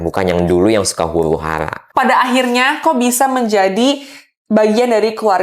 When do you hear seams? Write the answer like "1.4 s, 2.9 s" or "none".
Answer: 1.9 s